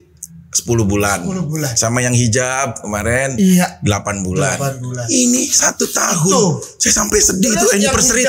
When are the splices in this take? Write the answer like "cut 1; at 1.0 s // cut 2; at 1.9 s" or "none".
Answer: none